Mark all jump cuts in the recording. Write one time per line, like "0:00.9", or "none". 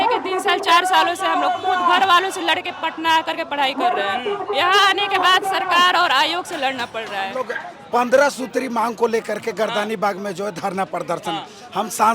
0:07.5